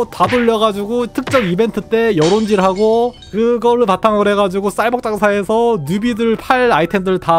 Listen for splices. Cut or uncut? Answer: uncut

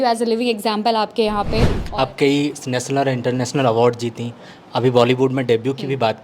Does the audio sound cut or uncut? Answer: cut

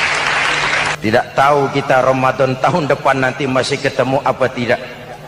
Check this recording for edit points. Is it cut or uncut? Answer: cut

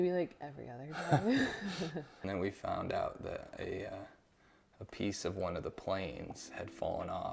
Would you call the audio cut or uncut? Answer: cut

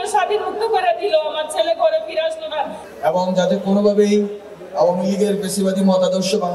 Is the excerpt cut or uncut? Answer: cut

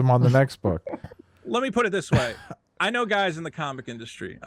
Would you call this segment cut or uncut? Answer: uncut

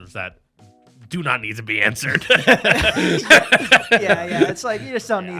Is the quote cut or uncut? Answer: uncut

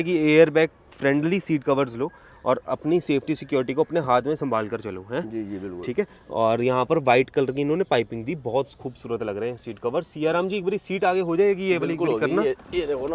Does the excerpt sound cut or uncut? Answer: uncut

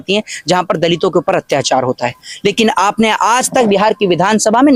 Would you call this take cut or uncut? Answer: uncut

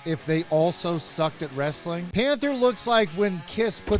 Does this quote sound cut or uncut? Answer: cut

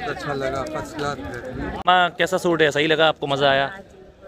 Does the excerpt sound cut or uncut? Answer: cut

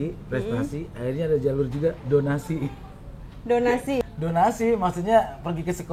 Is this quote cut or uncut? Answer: cut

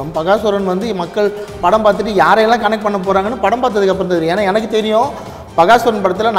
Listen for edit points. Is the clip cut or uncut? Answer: uncut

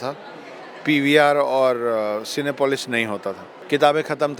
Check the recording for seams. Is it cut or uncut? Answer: cut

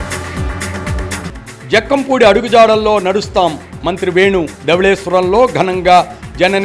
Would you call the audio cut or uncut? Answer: cut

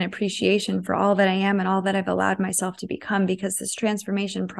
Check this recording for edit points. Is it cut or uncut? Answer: uncut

